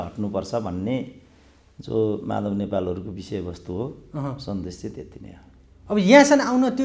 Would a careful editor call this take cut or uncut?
uncut